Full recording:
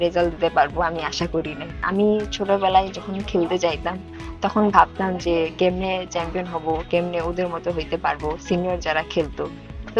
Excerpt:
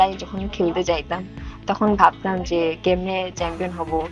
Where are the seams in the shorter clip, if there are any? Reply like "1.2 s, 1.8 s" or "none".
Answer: none